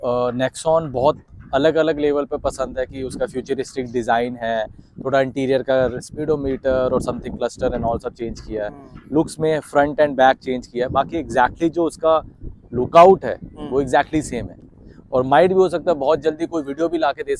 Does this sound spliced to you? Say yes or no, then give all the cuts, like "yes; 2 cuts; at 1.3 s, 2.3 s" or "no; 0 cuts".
no; 0 cuts